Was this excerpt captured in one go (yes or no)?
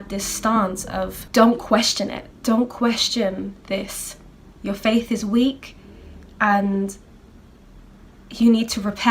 no